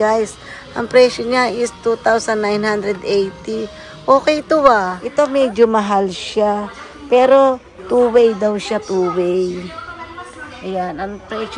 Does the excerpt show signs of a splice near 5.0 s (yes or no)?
yes